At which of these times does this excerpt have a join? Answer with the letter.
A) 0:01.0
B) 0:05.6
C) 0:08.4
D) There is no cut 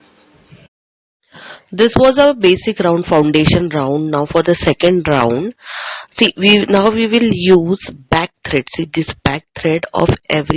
A